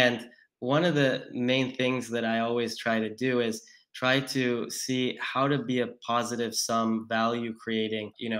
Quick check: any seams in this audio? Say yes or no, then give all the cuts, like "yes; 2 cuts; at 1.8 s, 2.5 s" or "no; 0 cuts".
no; 0 cuts